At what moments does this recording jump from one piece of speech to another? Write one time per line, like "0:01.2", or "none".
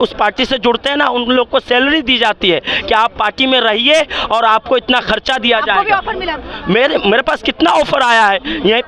none